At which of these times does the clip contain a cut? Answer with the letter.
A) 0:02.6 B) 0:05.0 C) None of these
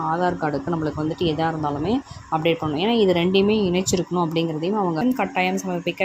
B